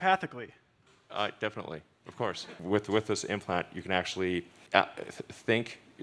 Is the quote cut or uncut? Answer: cut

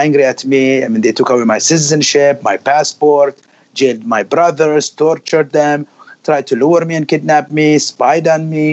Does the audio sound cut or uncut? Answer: uncut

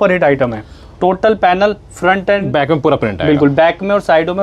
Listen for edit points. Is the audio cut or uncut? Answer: uncut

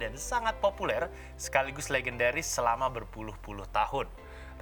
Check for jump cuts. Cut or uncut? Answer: uncut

